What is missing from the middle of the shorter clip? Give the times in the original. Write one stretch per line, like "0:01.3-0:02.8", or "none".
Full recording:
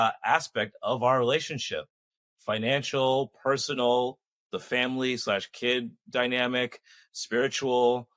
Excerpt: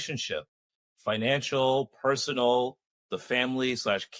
none